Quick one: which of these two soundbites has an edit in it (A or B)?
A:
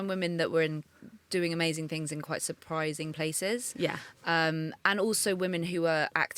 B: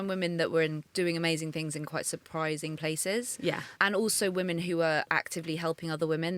B